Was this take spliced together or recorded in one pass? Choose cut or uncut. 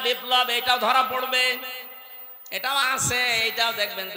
uncut